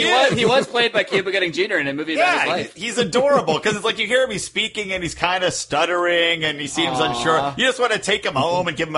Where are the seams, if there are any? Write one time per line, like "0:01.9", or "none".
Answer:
none